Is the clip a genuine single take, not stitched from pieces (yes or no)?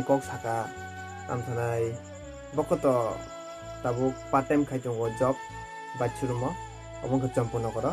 yes